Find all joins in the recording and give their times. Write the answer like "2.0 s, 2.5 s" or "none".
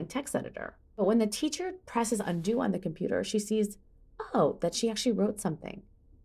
1.0 s